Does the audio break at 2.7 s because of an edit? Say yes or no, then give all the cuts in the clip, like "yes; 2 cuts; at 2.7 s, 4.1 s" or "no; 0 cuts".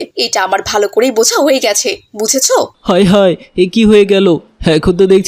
yes; 1 cut; at 2.7 s